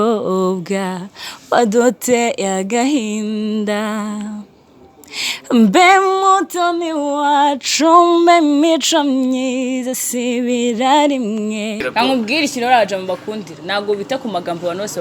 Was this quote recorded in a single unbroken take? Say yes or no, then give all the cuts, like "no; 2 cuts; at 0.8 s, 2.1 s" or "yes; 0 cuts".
no; 1 cut; at 11.8 s